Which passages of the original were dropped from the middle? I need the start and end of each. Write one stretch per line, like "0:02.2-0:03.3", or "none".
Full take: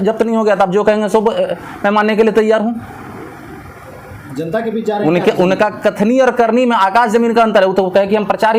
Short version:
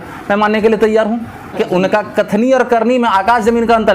0:03.1-0:05.2

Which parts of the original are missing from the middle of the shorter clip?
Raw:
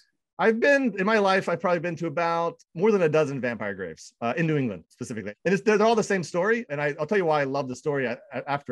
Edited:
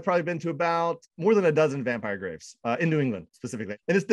none

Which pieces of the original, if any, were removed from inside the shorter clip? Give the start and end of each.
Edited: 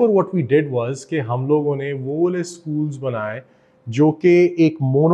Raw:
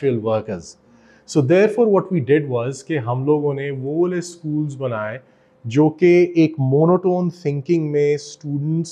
none

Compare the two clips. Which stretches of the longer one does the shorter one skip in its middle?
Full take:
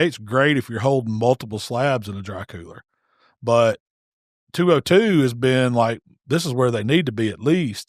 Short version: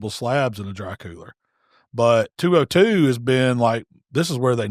0:03.8-0:04.5

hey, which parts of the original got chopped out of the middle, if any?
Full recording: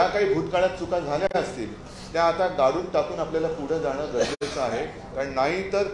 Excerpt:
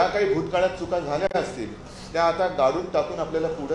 none

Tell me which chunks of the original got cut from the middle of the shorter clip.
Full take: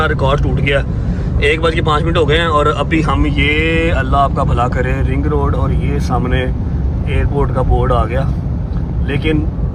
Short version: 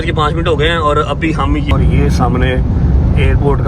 0:03.4-0:05.6

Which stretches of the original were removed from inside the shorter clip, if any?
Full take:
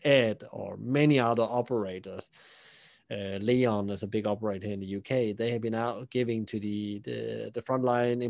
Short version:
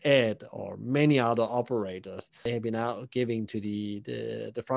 0:02.5-0:05.4

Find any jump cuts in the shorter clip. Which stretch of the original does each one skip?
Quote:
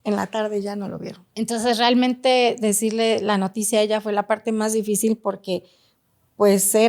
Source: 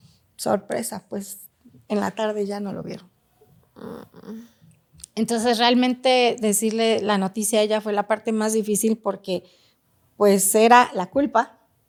0:03.0-0:05.0

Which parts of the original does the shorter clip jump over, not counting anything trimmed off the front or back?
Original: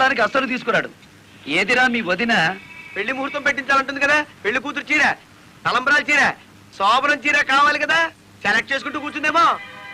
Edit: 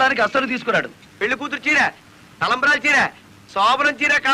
0:01.1-0:04.3

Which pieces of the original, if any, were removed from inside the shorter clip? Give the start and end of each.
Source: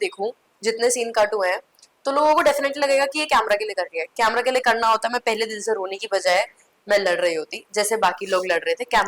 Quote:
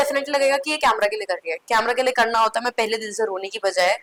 none

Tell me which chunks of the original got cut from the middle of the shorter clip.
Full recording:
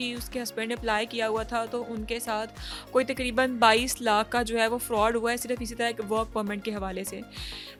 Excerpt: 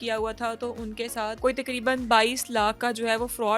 0:02.5-0:02.9

